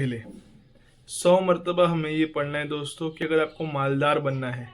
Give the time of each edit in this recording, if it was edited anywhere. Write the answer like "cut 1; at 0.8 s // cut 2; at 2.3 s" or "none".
cut 1; at 3.2 s